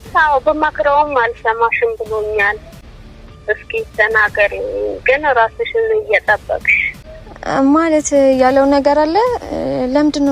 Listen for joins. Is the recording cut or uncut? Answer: uncut